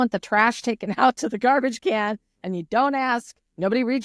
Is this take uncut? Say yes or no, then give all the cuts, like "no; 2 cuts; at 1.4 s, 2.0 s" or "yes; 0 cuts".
yes; 0 cuts